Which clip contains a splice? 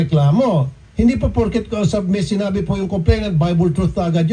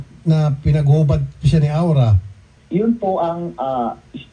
second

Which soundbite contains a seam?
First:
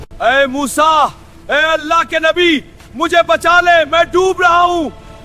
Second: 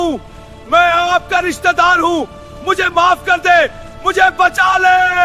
first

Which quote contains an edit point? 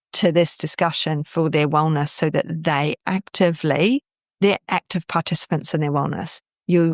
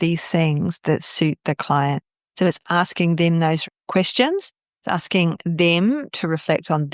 second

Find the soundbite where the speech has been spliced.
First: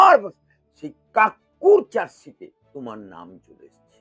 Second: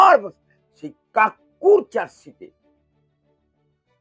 first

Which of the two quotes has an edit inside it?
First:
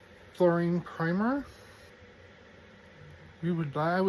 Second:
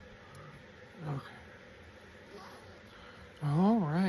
first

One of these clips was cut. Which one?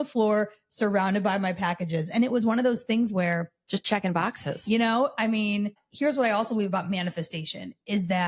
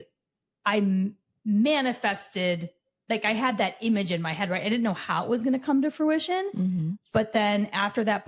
first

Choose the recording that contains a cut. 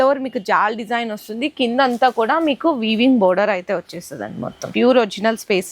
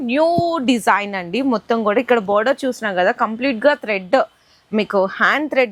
first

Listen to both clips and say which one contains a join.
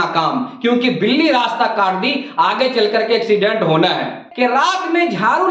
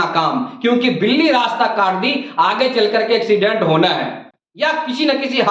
first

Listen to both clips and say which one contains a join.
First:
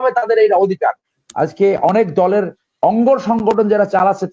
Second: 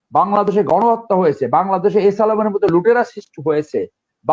first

